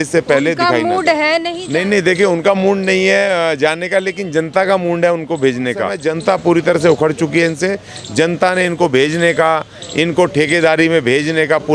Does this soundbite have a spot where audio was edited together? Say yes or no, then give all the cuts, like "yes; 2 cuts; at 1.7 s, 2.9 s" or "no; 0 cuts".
yes; 2 cuts; at 1.6 s, 6.0 s